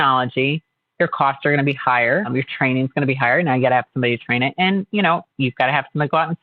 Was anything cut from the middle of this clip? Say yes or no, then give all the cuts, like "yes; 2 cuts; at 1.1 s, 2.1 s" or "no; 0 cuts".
yes; 1 cut; at 2.3 s